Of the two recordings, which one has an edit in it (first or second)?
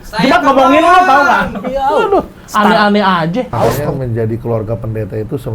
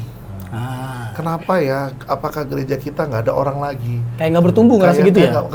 first